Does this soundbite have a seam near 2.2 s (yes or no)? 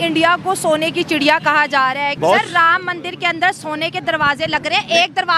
yes